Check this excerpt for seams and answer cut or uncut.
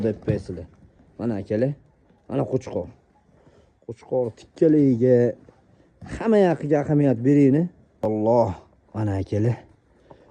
cut